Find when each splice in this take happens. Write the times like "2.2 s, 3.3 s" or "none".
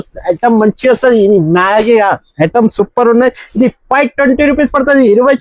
none